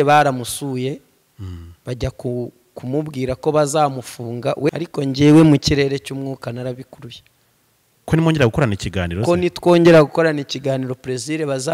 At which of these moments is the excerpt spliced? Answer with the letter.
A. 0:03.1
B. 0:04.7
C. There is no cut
B